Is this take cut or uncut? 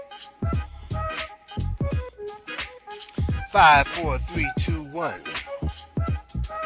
cut